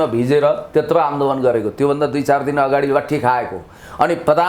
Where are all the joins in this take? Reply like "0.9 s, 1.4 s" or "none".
none